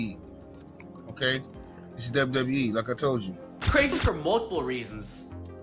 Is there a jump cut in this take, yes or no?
yes